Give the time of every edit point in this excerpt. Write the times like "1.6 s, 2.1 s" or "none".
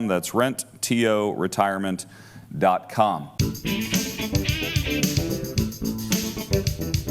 3.3 s